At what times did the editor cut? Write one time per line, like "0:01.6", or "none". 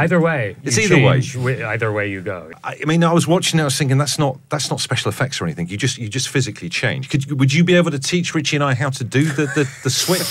none